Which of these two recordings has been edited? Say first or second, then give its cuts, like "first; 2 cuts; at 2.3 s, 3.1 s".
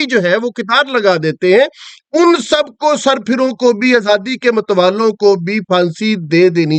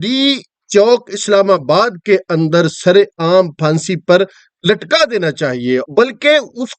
second; 1 cut; at 5.8 s